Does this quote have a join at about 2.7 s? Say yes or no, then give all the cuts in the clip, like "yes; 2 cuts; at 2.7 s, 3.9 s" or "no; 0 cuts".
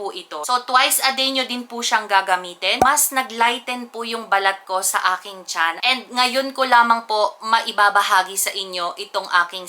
yes; 2 cuts; at 2.7 s, 5.8 s